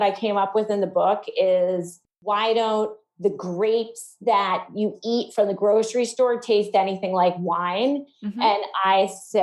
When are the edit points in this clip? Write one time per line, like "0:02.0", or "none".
none